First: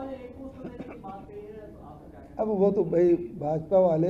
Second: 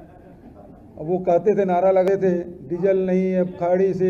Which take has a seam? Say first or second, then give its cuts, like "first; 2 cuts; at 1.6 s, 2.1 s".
second; 1 cut; at 2.1 s